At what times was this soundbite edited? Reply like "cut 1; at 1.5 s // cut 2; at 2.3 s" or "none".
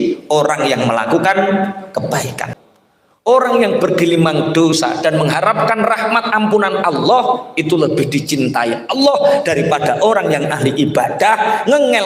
cut 1; at 2.5 s